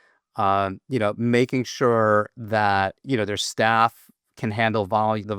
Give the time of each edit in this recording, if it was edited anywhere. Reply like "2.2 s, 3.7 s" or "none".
3.0 s